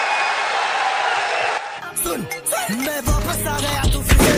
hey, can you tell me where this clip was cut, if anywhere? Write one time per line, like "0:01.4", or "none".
none